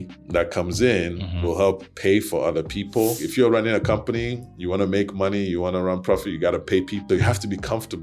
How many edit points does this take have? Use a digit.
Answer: 2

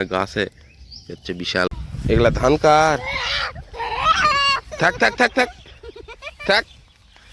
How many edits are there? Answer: 1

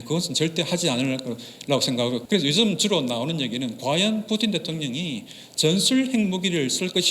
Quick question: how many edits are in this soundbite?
1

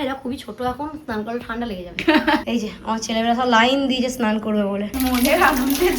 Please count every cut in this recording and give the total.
2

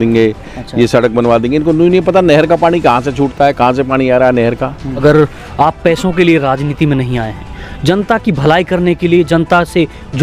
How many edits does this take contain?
1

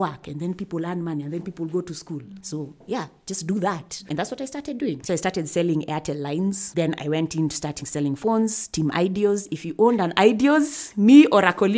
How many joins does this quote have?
3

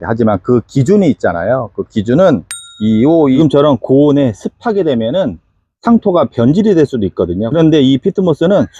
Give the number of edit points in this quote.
1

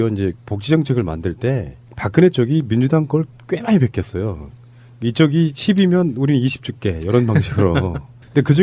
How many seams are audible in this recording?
0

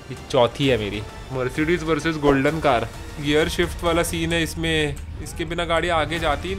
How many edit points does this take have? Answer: 1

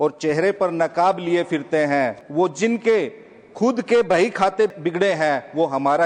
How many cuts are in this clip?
2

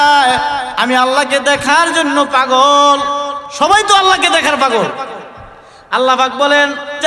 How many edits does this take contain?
1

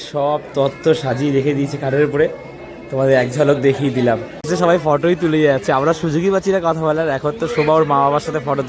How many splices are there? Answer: 1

